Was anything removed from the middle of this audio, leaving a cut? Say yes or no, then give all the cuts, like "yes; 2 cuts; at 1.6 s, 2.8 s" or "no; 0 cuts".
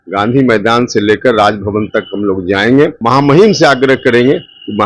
yes; 1 cut; at 3.0 s